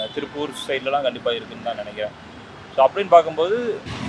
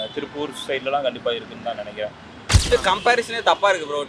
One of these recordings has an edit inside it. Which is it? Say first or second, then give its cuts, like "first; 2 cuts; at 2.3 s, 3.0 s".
second; 1 cut; at 2.5 s